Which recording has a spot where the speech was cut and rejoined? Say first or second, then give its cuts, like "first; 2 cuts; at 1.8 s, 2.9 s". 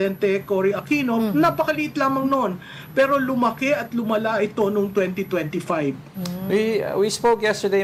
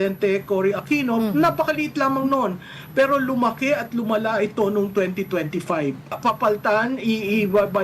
second; 1 cut; at 6.2 s